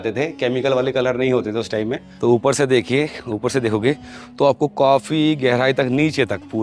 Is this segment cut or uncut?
cut